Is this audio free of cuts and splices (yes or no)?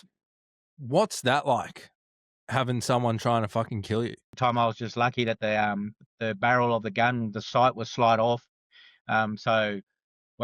no